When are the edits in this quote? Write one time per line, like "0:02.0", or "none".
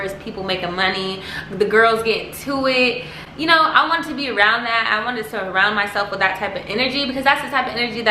none